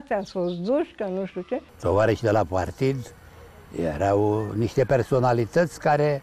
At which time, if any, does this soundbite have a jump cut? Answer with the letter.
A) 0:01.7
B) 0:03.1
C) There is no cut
A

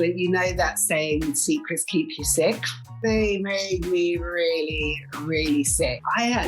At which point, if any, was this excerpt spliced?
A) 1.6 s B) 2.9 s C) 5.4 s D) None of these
B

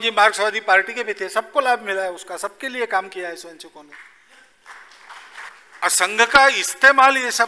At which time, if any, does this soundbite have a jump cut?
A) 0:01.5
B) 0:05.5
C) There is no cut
B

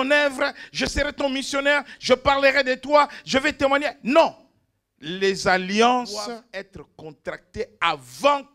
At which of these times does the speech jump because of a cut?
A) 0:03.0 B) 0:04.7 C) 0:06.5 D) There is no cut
C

